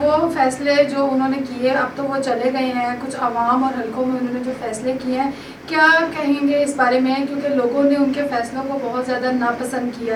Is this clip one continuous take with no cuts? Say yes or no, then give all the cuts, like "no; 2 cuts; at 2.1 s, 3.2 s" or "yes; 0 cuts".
yes; 0 cuts